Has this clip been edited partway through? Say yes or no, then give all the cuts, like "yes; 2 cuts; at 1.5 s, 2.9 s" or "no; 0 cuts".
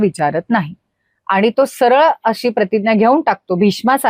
no; 0 cuts